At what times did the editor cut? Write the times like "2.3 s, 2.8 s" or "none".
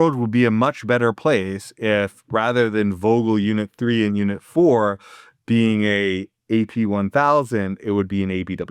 none